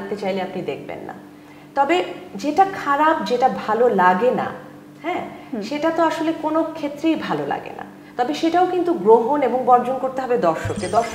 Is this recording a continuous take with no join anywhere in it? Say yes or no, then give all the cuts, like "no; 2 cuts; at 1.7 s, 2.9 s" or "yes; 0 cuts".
yes; 0 cuts